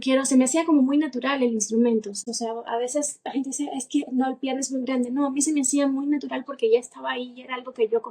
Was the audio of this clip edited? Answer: yes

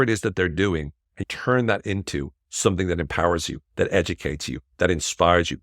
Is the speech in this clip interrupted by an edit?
yes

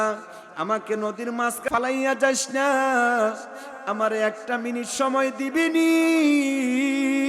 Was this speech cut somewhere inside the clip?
yes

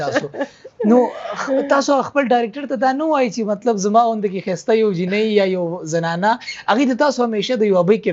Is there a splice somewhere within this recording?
no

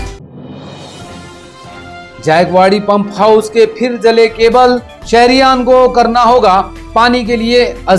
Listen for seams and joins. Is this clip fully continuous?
no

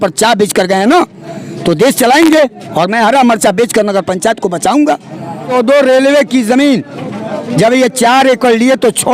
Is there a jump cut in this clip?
yes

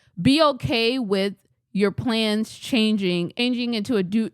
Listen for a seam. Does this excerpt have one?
yes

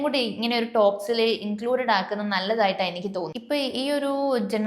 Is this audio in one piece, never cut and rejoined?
no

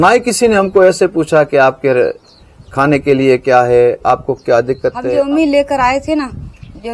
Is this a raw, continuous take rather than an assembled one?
no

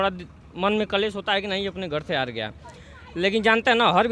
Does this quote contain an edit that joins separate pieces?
no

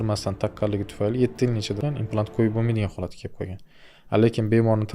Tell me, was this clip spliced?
yes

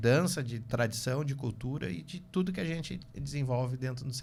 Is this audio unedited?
yes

